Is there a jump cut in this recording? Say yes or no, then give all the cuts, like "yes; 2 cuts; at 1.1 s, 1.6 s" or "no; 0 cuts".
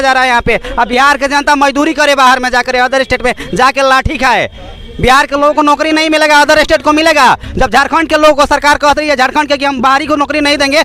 no; 0 cuts